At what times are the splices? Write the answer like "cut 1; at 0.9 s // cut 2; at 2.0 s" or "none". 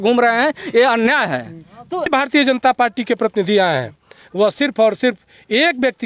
cut 1; at 2.1 s